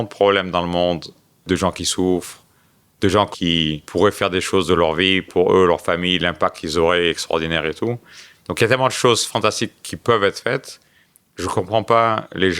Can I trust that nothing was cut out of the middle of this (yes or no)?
no